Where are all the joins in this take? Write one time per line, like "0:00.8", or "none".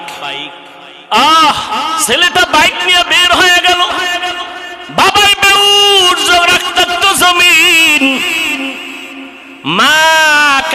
0:01.0